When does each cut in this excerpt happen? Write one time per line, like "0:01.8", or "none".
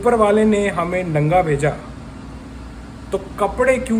none